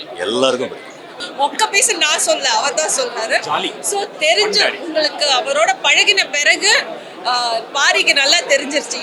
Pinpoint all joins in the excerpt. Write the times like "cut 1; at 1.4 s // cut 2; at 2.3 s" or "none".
cut 1; at 1.2 s